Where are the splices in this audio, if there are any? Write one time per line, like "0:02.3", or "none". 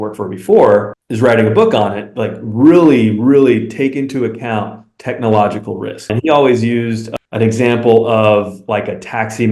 0:06.1